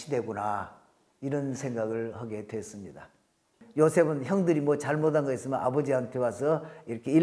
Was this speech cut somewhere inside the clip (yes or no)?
yes